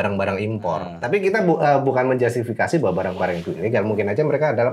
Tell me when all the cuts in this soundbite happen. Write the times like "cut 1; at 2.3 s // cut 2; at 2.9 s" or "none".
cut 1; at 0.9 s